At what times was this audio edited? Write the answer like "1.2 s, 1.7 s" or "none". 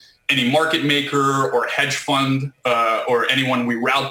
none